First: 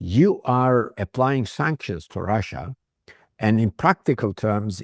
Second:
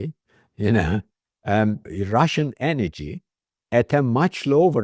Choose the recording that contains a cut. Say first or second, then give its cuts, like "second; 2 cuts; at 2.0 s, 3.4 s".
first; 1 cut; at 0.9 s